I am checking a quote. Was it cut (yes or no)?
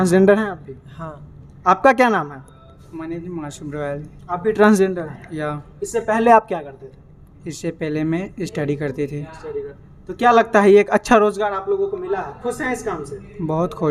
no